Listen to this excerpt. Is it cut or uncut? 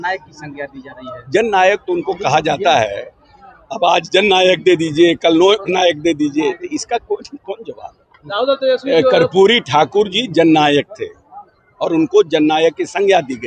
uncut